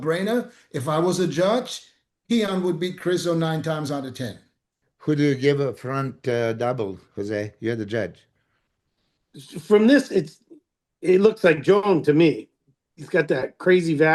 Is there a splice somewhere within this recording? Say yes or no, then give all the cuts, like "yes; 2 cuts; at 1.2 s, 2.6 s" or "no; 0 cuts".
yes; 1 cut; at 4.7 s